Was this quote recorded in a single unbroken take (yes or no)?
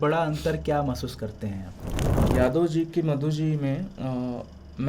no